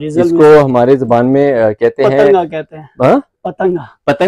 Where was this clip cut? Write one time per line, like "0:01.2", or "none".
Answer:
none

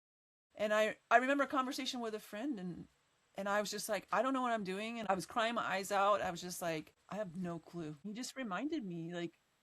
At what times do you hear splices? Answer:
0:05.0
0:07.0
0:08.1

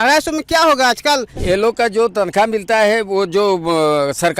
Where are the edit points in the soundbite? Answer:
0:01.4

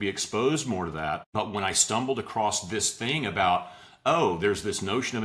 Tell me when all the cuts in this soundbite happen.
0:01.3

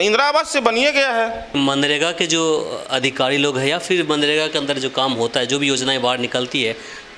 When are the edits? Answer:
0:01.5

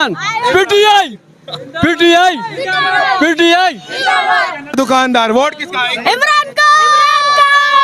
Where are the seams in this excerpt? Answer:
0:04.7

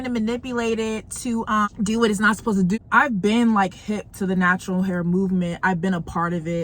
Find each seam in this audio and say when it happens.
0:01.7
0:02.8

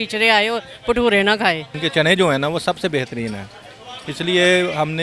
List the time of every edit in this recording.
0:01.8

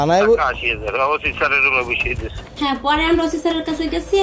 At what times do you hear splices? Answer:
0:02.5

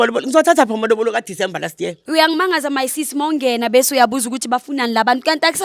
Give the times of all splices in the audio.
0:02.0

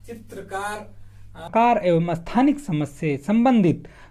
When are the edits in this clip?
0:01.5

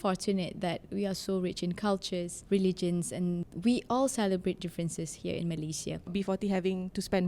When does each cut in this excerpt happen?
0:02.4
0:03.5
0:06.1

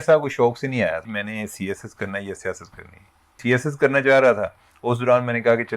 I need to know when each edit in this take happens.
0:01.1
0:03.4

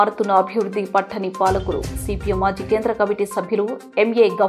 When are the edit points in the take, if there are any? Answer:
none

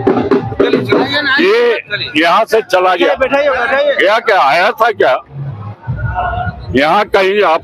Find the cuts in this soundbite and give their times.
none

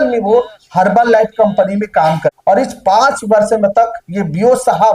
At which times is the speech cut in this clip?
0:02.4

